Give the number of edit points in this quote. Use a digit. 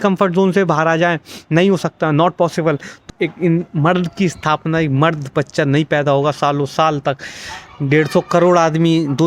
1